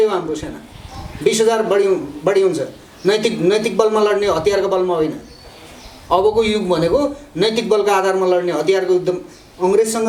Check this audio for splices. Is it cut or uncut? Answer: uncut